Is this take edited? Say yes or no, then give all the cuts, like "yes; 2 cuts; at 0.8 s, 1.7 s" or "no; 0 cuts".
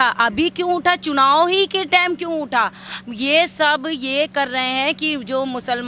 no; 0 cuts